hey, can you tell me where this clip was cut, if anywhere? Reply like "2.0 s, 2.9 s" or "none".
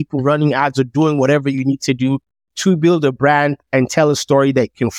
none